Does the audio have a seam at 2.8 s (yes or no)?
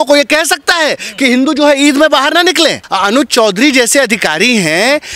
yes